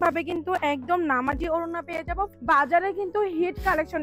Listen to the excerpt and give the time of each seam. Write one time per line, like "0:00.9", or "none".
0:02.3